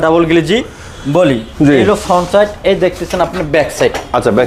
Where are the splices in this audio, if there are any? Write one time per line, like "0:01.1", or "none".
none